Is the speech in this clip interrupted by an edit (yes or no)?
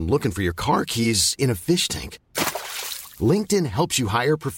no